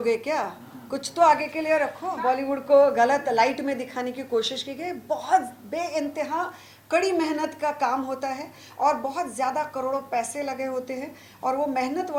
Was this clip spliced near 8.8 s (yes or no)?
no